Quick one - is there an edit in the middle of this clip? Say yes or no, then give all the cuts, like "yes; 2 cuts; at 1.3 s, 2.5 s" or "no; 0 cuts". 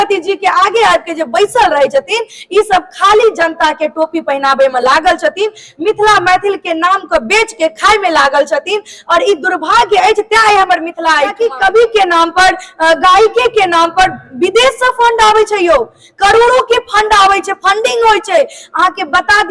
yes; 1 cut; at 11.3 s